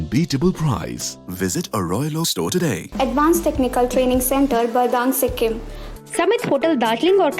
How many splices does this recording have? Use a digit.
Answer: 2